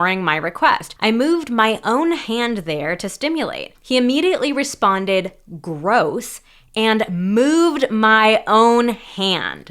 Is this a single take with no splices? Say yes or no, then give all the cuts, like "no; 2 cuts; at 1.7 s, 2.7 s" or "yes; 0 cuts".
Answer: no; 2 cuts; at 0.9 s, 3.7 s